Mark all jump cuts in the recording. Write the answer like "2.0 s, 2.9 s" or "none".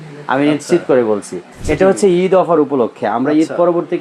1.5 s

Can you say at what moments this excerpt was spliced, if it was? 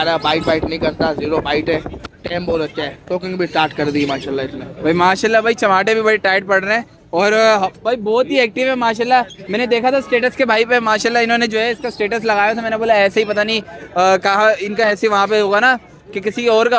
none

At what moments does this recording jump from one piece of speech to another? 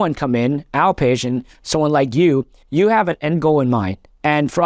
2.6 s

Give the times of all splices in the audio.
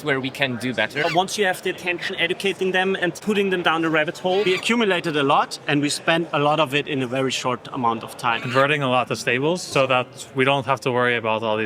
1.0 s, 3.2 s, 4.5 s, 8.4 s, 9.7 s

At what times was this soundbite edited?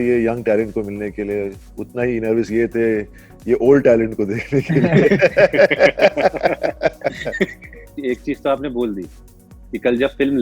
7.9 s

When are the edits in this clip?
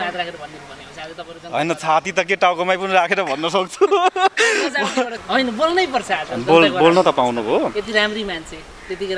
5.2 s

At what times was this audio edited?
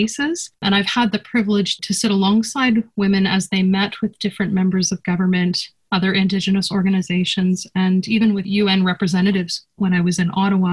8.4 s

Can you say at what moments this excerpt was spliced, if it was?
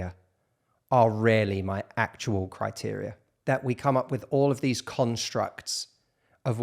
3.4 s

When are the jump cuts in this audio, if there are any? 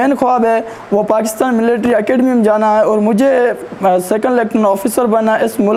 none

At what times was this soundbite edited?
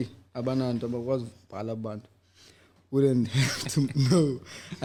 none

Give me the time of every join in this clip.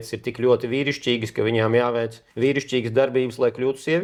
none

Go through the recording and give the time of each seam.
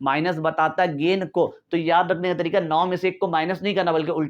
none

